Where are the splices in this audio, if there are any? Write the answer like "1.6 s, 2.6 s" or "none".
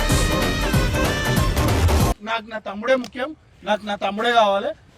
2.2 s